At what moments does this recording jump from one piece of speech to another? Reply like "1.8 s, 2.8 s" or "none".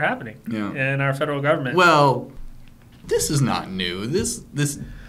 2.3 s